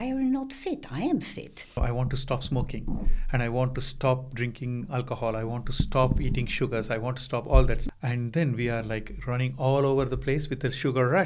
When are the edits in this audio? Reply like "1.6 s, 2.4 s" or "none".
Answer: 1.8 s, 7.8 s